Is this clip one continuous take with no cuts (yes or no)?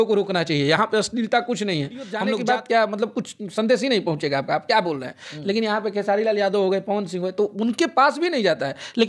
no